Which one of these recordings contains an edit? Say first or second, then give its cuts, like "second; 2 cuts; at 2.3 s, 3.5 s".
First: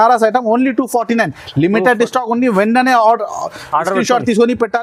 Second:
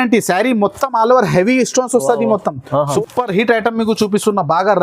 second; 1 cut; at 2.9 s